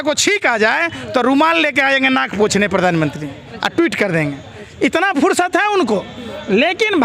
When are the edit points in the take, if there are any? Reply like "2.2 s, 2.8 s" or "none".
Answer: none